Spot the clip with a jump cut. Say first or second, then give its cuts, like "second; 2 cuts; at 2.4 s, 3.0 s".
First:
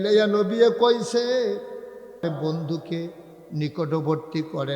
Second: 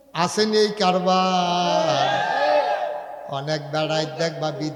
first; 1 cut; at 2.2 s